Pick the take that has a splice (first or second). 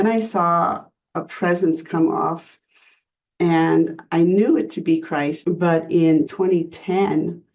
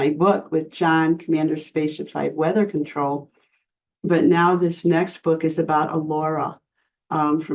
first